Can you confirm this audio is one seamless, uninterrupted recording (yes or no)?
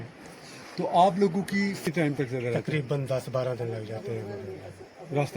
no